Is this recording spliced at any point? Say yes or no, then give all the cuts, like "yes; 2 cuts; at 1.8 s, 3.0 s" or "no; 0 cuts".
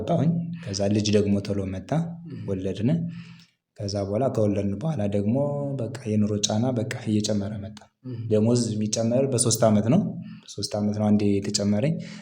no; 0 cuts